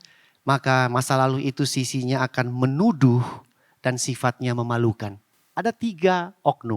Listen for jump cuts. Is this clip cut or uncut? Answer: cut